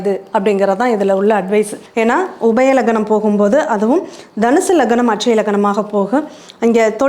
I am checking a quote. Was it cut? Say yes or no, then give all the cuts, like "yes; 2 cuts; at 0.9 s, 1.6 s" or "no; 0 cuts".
no; 0 cuts